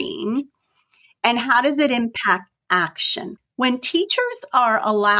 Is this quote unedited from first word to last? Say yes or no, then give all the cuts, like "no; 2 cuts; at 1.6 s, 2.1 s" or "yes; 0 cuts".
no; 1 cut; at 3.4 s